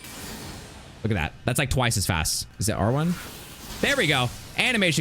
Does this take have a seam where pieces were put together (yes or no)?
yes